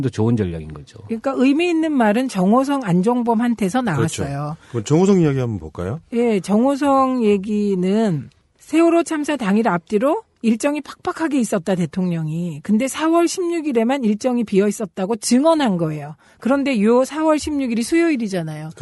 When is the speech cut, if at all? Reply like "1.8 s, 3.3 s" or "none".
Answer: 17.6 s